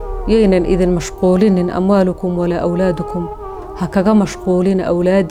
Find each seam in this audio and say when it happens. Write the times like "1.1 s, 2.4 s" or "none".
none